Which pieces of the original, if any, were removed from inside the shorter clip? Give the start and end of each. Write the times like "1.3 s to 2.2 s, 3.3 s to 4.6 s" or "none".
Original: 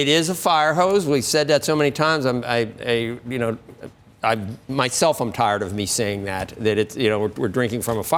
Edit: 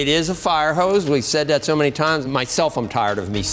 2.2 s to 4.7 s